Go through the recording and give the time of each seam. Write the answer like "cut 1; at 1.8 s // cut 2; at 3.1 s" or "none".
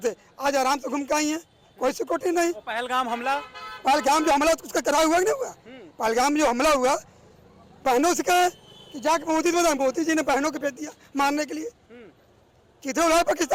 none